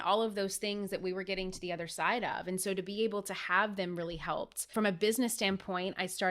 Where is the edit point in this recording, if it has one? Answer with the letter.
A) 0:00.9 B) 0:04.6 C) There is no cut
B